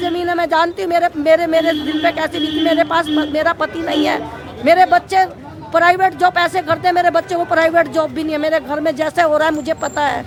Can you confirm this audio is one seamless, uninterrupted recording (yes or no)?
yes